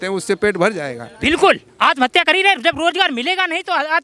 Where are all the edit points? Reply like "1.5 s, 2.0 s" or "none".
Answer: 1.0 s